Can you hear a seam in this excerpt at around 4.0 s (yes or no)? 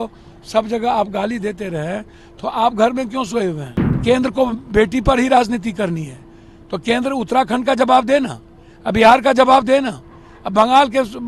yes